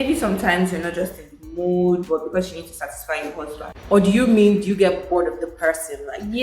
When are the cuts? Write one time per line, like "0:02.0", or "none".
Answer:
none